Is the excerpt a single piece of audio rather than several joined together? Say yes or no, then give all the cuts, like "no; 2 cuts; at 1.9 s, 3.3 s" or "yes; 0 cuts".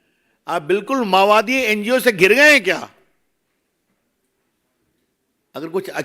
yes; 0 cuts